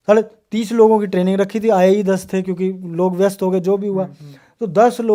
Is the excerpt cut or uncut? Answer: uncut